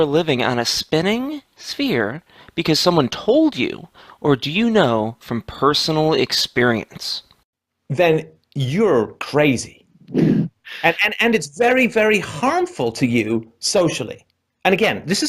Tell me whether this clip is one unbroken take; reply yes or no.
no